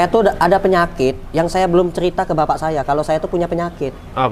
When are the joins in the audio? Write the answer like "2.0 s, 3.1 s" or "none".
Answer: none